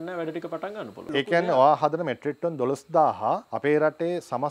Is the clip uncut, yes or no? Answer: no